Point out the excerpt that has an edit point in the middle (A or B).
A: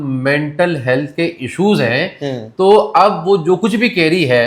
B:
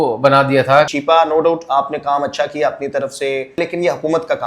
B